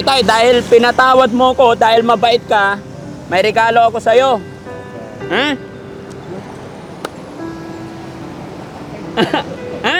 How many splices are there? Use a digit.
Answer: 0